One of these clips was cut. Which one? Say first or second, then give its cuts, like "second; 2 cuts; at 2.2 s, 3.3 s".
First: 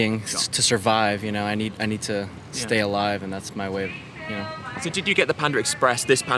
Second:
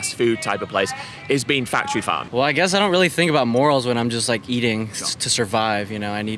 second; 1 cut; at 2.2 s